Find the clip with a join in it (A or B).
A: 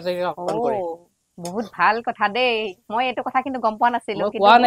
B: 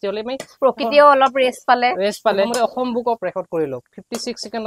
B